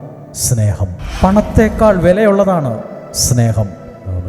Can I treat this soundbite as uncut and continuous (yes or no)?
no